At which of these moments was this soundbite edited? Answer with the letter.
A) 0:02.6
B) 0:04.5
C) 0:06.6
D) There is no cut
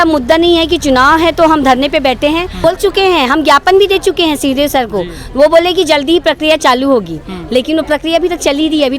A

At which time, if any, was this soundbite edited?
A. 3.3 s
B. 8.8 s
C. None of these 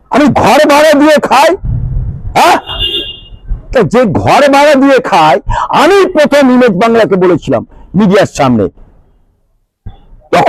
C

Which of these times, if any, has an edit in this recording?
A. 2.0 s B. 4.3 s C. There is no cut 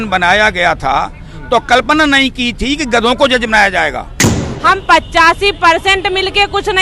B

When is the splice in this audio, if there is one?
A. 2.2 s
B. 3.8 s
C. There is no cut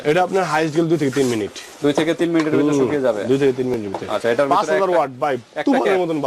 C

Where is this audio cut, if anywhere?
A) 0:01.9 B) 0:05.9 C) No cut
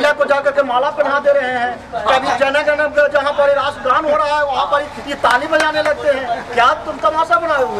C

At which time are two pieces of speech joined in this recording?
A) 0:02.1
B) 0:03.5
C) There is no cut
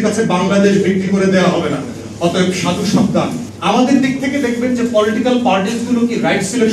B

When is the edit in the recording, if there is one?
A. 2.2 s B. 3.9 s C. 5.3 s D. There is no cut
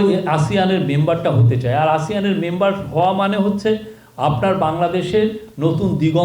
D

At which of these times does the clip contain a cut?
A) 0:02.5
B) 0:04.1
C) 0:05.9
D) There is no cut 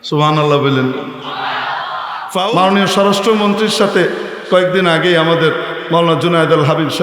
A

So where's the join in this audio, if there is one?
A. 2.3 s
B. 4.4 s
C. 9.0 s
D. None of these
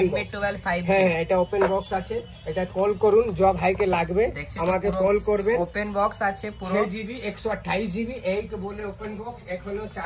D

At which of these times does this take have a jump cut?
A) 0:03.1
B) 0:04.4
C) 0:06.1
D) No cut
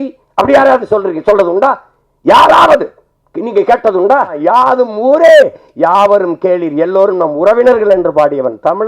B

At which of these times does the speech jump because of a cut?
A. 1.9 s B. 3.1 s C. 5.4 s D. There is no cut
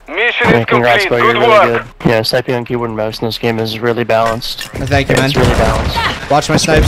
A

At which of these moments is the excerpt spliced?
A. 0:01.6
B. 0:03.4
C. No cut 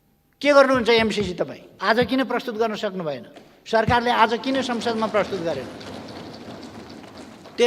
A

